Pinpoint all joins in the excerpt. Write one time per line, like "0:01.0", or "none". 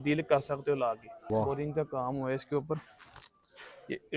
0:01.1